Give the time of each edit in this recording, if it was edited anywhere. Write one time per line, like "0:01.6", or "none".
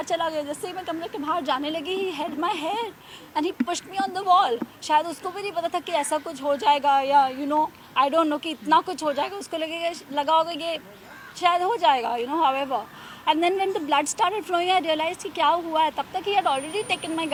none